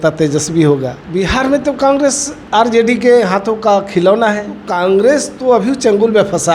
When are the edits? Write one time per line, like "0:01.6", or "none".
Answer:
0:01.0
0:04.6